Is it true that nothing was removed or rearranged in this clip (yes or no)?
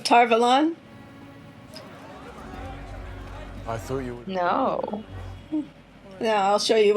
yes